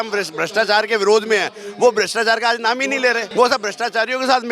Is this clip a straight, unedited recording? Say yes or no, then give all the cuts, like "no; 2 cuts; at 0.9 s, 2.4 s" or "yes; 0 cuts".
no; 1 cut; at 3.2 s